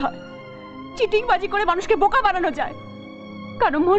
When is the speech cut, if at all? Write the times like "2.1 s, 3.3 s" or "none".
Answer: none